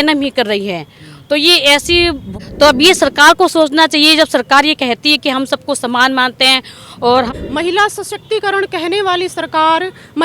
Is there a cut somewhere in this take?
yes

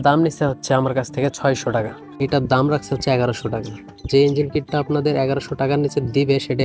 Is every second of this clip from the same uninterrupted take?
no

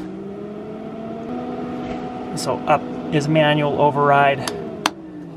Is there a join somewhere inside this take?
yes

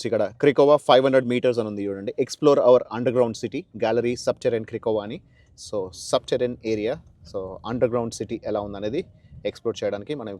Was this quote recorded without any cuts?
yes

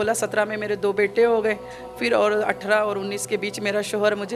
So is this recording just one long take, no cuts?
yes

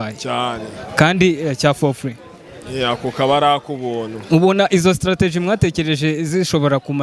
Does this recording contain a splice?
no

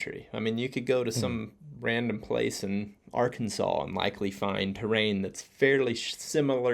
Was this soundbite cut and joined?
yes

